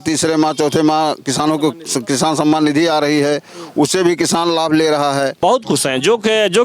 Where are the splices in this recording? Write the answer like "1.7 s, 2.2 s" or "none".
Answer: 5.3 s